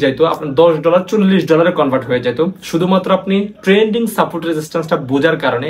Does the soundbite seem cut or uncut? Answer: uncut